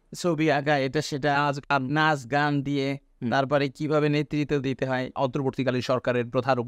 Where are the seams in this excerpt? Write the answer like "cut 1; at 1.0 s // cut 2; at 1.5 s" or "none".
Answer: cut 1; at 5.1 s